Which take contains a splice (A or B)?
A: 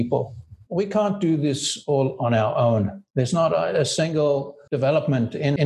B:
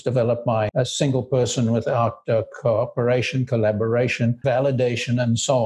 B